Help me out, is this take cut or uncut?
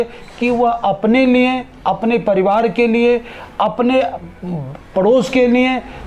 uncut